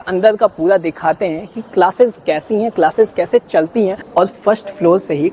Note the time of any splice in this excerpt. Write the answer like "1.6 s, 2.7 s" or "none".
4.0 s